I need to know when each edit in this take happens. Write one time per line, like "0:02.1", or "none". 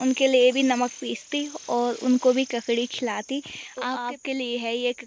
0:03.6